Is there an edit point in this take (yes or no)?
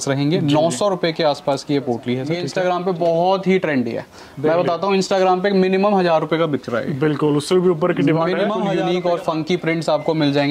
yes